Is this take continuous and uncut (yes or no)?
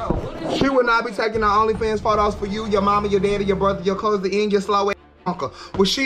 yes